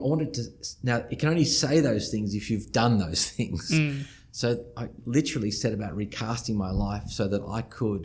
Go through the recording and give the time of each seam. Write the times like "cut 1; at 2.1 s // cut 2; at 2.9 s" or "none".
none